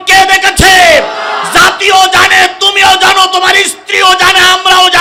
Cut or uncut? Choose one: uncut